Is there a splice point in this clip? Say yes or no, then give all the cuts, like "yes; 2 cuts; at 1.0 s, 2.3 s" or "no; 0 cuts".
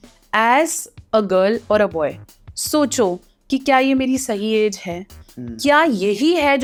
no; 0 cuts